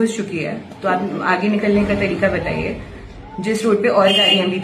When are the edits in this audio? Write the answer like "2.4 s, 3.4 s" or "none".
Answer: none

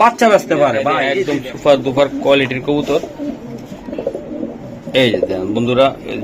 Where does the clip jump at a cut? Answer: 1.0 s

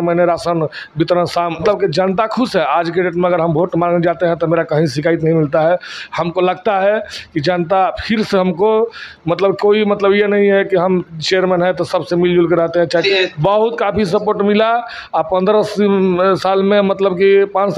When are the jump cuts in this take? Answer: 1.6 s, 13.0 s

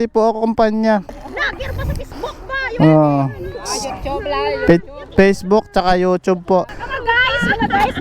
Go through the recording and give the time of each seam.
1.1 s, 6.8 s

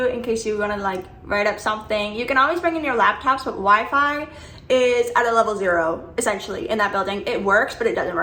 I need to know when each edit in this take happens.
none

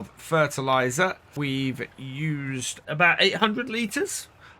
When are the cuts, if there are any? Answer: 1.3 s, 2.7 s

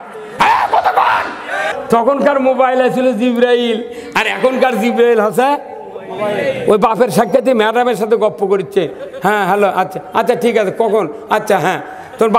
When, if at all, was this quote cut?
1.7 s

